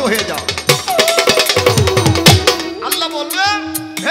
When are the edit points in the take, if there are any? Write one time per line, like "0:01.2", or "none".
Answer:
none